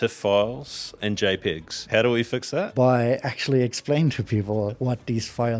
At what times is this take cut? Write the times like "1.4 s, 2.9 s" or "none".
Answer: 0.9 s, 1.8 s, 2.7 s, 4.8 s